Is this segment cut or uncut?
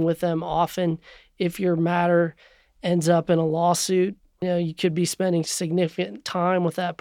cut